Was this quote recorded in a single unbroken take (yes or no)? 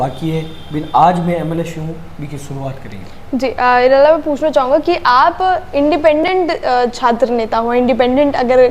yes